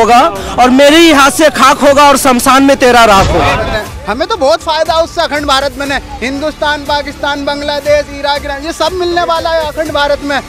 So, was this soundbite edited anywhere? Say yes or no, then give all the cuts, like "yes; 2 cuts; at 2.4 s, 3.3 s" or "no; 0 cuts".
yes; 1 cut; at 3.6 s